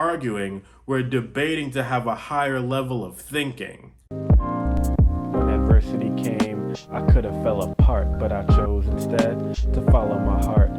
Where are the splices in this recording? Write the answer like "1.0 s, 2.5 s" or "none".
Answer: 4.1 s